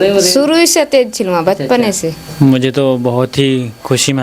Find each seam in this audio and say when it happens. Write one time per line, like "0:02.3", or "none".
0:02.2